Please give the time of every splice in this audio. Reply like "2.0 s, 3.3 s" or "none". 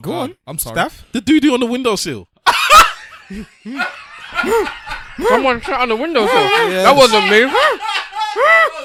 none